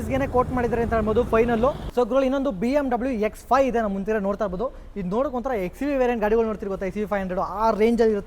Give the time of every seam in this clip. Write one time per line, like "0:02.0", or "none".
0:01.8